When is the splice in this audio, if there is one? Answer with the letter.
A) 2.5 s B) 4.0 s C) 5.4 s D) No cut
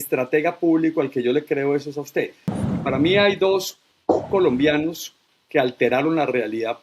A